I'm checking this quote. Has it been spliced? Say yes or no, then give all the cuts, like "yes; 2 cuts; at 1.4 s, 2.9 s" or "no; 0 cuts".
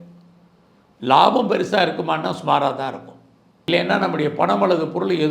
yes; 1 cut; at 3.7 s